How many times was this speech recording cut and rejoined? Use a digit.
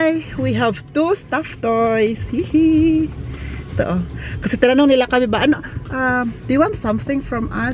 0